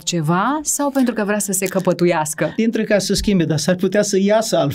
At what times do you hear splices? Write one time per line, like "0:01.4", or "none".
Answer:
0:02.6